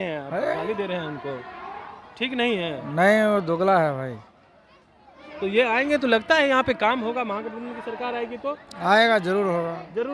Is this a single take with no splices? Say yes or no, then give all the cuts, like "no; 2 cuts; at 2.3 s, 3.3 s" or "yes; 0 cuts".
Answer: yes; 0 cuts